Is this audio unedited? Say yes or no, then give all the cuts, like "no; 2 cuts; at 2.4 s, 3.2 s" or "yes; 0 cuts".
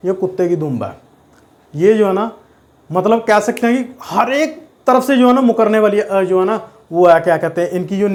yes; 0 cuts